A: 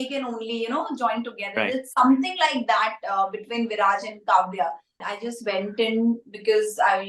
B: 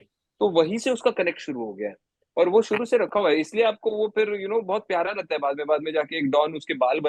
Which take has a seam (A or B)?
A